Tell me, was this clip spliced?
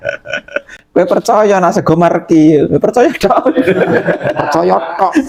no; 0 cuts

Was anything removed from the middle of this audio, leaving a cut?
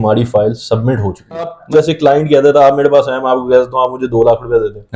yes; 1 cut; at 1.6 s

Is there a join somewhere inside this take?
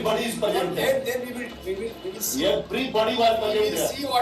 no; 0 cuts

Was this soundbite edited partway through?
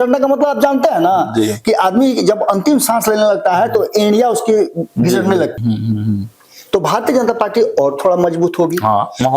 yes; 1 cut; at 5.6 s

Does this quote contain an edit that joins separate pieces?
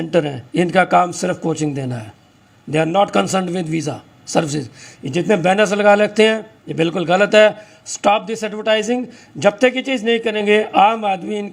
no; 0 cuts

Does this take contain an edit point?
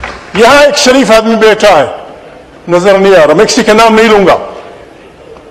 no; 0 cuts

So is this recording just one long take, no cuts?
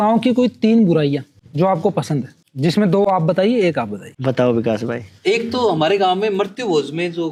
yes; 0 cuts

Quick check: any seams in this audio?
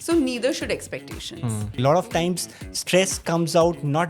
yes; 1 cut; at 1.7 s

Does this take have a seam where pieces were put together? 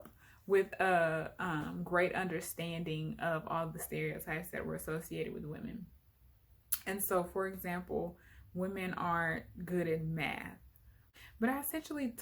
yes; 1 cut; at 11.0 s

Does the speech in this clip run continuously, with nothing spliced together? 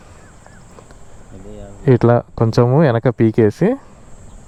yes; 0 cuts

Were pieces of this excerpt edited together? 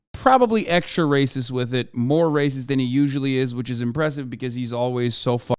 no; 0 cuts

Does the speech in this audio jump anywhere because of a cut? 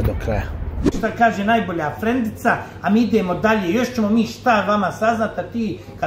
yes; 1 cut; at 0.9 s

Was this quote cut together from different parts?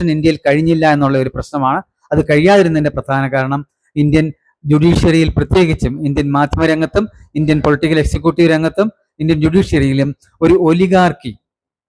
no; 0 cuts

